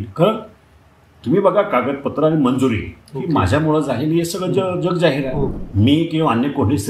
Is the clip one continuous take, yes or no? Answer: no